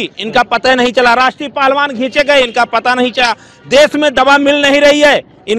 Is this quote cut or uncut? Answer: uncut